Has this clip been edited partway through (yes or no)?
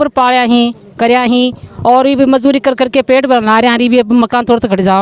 no